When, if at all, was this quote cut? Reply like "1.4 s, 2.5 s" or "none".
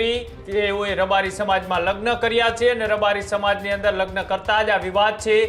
none